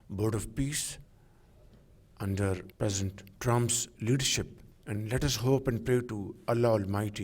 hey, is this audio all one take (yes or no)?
yes